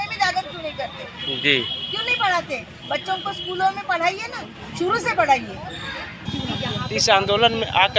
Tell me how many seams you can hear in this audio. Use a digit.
1